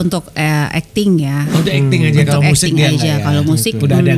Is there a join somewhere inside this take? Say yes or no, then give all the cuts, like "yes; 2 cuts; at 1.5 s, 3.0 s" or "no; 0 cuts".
no; 0 cuts